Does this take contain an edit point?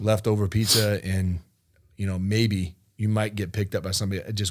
no; 0 cuts

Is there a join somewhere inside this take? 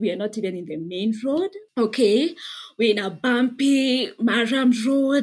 no; 0 cuts

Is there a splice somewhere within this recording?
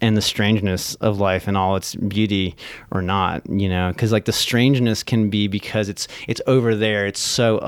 no; 0 cuts

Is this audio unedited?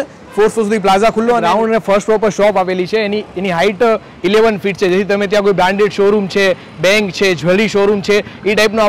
no; 1 cut; at 1.4 s

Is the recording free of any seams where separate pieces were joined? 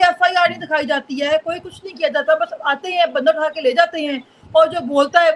yes; 0 cuts

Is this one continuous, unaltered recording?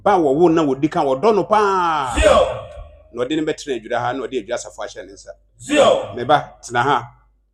yes; 0 cuts

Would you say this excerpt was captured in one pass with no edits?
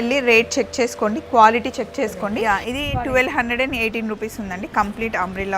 no; 1 cut; at 2.4 s

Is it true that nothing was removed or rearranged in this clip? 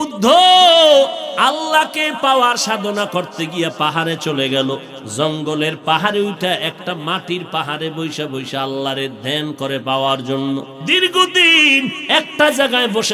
no; 3 cuts; at 1.2 s, 5.0 s, 10.8 s

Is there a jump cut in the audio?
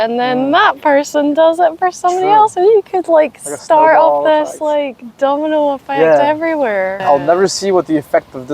yes; 1 cut; at 7.0 s

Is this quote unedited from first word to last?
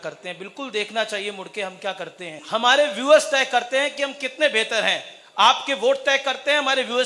no; 1 cut; at 2.4 s

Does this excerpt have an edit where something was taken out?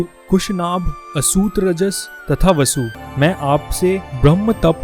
yes; 1 cut; at 3.0 s

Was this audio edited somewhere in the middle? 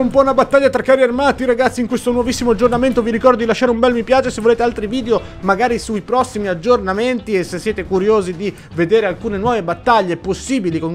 no; 0 cuts

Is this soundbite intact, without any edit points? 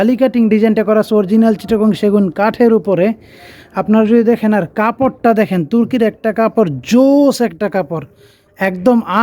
yes; 0 cuts

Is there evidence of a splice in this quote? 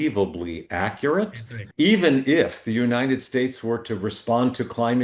yes; 1 cut; at 1.6 s

